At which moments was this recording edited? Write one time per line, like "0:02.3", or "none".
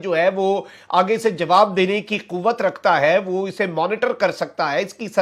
none